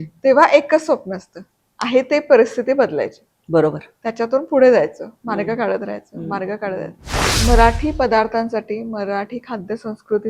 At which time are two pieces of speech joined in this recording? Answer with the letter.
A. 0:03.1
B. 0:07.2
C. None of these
B